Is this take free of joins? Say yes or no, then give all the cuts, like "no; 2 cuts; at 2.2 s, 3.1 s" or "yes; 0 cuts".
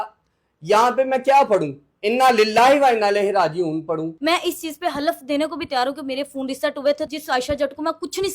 no; 2 cuts; at 4.1 s, 7.1 s